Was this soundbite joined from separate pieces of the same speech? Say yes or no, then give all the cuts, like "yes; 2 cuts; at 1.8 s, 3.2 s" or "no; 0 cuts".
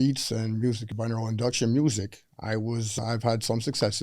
yes; 2 cuts; at 0.9 s, 3.0 s